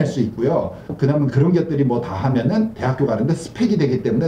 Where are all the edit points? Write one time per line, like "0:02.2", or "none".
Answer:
none

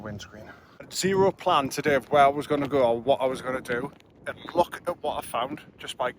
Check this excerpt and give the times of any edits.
0:00.9

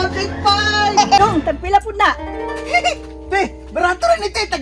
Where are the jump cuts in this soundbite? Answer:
0:01.2

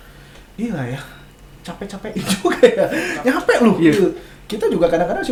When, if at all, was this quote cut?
none

